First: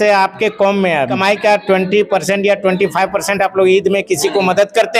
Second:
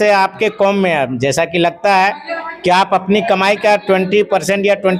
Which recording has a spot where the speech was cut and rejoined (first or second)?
first